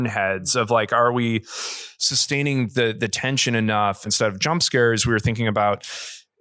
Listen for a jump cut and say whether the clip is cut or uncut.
cut